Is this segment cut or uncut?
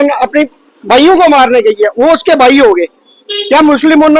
uncut